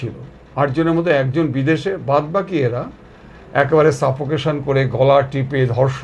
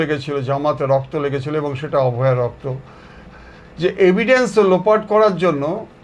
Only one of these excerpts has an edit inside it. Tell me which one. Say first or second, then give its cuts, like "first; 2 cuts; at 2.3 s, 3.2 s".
second; 1 cut; at 3.2 s